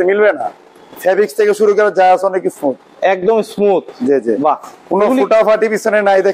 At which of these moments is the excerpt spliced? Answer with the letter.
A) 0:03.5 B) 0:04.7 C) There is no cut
C